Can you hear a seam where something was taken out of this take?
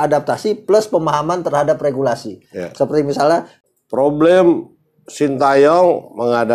yes; 1 cut; at 3.6 s

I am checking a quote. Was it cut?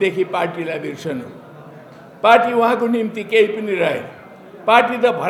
no; 0 cuts

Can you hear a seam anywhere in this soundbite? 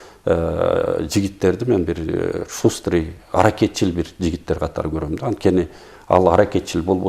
no; 0 cuts

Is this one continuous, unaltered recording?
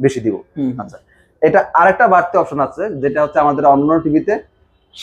yes; 0 cuts

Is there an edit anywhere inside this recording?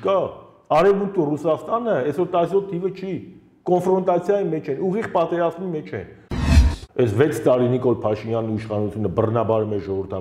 yes; 1 cut; at 6.4 s

